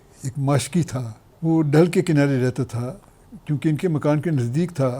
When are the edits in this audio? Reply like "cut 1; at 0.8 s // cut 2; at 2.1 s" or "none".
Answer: cut 1; at 1.2 s